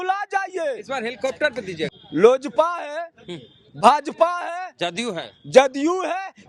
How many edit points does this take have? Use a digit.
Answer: 1